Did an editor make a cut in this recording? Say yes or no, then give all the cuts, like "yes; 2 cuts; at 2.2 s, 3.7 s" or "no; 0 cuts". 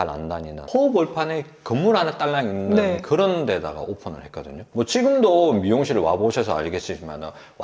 no; 0 cuts